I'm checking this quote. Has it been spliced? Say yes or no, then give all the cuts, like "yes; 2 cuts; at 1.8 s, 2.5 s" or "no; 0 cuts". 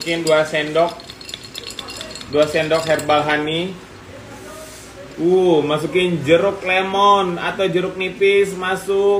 no; 0 cuts